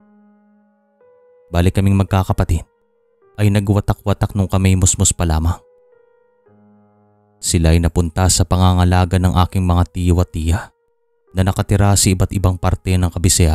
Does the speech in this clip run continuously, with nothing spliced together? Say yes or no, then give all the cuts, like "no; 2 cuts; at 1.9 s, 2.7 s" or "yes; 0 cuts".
no; 1 cut; at 1.4 s